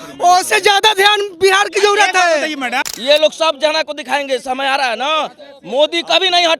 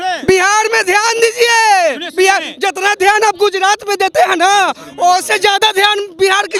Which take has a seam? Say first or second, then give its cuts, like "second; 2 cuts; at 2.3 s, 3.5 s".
first; 1 cut; at 2.9 s